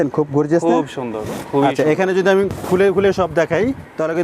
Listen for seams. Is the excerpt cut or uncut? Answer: uncut